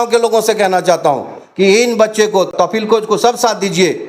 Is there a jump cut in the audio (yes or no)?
yes